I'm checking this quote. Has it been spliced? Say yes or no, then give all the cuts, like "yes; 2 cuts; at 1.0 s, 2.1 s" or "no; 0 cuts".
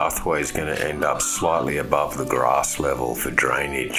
no; 0 cuts